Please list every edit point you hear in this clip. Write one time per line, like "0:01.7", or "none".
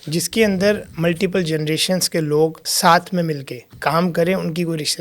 0:02.6
0:03.6